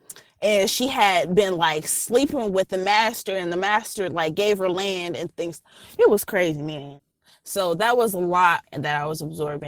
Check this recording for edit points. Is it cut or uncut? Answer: cut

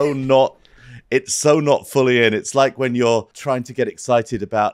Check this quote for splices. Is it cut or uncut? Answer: cut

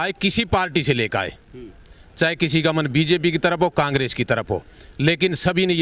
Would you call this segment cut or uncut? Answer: uncut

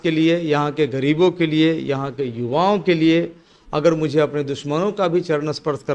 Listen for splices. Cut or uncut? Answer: uncut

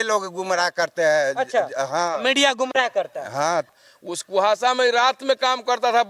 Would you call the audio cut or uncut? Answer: cut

